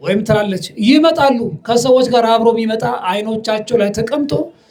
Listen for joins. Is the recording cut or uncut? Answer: uncut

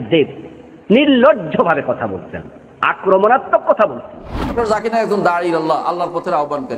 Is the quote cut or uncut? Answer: cut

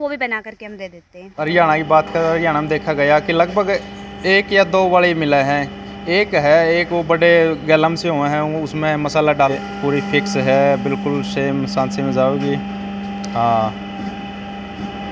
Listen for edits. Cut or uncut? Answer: cut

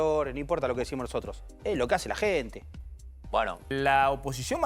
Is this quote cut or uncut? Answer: cut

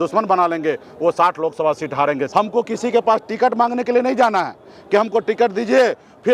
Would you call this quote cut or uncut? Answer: cut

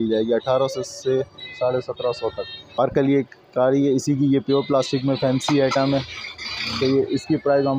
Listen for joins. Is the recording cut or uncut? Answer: cut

